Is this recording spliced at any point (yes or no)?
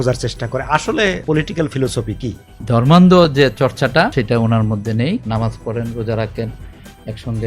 yes